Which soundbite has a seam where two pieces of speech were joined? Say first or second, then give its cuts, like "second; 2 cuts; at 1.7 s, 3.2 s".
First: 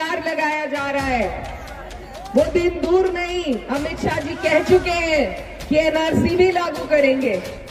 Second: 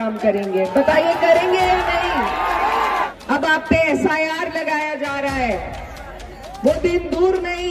second; 1 cut; at 3.1 s